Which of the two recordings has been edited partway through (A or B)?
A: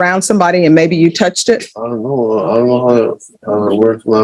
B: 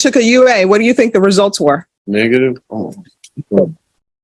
B